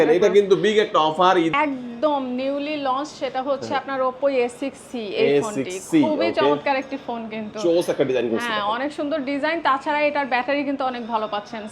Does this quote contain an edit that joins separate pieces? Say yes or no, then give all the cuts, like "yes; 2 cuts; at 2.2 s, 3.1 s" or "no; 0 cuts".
yes; 1 cut; at 1.5 s